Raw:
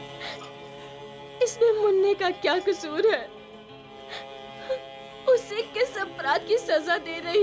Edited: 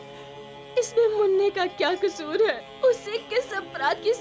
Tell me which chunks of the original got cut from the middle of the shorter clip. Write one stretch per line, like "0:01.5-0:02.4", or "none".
0:03.3-0:05.1

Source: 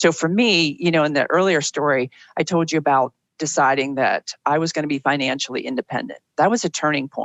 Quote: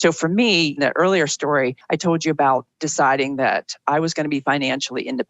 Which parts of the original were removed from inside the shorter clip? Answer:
0:00.8-0:01.1
0:02.1-0:02.3
0:03.2-0:03.3

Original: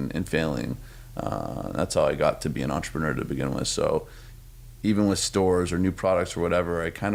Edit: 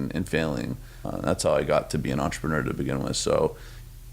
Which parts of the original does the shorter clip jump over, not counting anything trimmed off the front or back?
0:01.0-0:01.5

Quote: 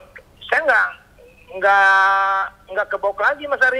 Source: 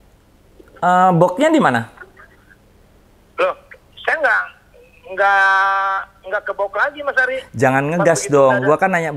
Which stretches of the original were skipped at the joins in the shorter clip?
none

